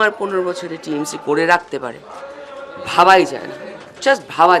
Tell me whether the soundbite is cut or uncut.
uncut